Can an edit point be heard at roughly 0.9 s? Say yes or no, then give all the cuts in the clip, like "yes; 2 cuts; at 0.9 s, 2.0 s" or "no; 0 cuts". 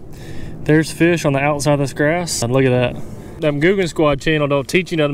no; 1 cut; at 2.5 s